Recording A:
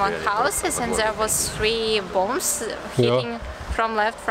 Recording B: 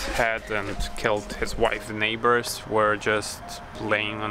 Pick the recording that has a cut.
B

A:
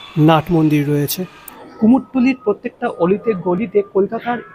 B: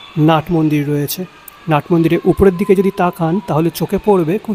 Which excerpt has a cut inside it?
A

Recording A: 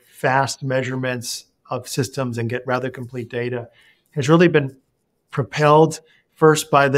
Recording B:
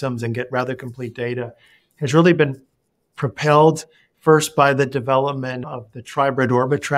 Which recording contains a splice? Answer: B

